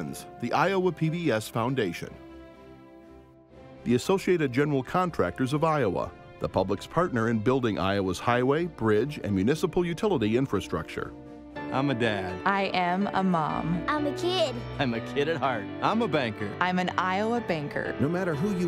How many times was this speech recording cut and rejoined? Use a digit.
2